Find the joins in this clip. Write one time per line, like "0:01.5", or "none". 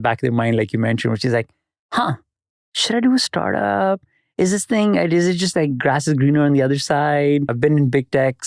0:07.5